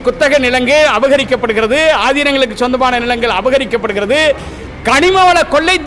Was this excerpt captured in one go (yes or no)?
yes